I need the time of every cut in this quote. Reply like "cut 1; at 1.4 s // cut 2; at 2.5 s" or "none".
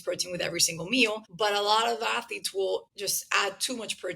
cut 1; at 1.3 s // cut 2; at 2.9 s